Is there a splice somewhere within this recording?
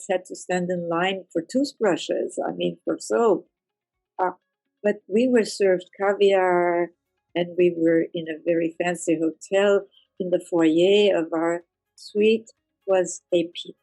no; 0 cuts

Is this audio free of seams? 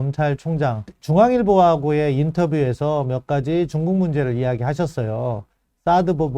no; 1 cut; at 0.9 s

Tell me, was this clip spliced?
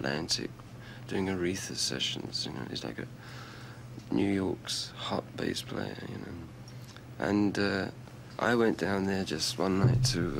yes; 1 cut; at 4.2 s

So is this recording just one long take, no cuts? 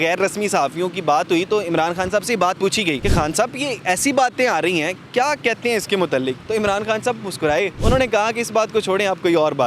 no; 2 cuts; at 3.0 s, 7.8 s

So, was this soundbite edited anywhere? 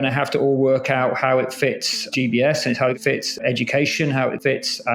yes; 1 cut; at 2.9 s

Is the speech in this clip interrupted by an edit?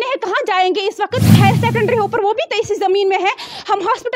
yes; 1 cut; at 1.4 s

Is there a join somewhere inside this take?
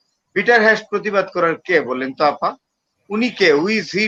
no; 0 cuts

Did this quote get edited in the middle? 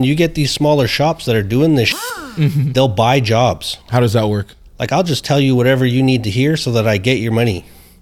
yes; 1 cut; at 3.9 s

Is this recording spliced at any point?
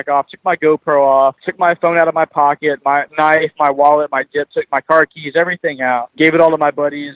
yes; 3 cuts; at 1.5 s, 3.1 s, 6.1 s

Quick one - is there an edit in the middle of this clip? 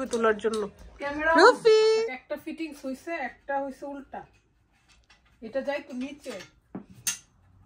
yes; 1 cut; at 2.0 s

